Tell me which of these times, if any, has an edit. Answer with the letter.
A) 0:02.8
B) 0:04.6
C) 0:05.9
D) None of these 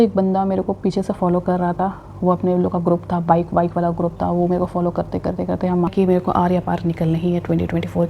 C